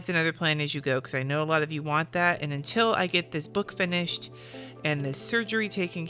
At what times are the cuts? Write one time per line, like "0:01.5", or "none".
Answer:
none

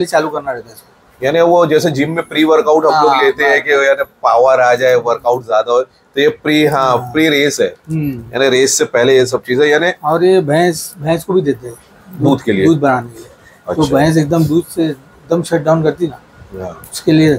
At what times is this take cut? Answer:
none

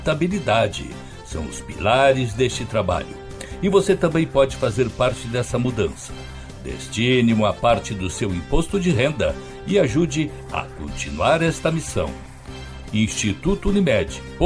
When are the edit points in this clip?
none

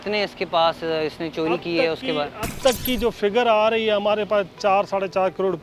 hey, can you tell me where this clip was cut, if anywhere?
none

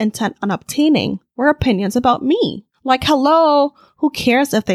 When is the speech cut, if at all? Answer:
0:02.7

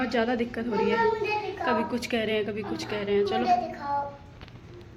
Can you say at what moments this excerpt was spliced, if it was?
none

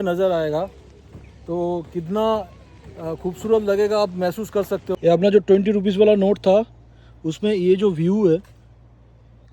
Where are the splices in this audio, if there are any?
0:05.0

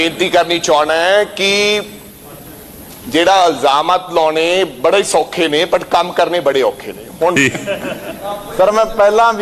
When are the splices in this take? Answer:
0:07.4

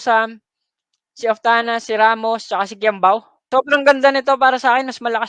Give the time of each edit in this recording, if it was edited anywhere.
0:03.5

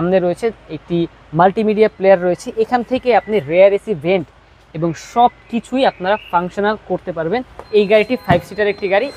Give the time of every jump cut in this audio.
0:07.6

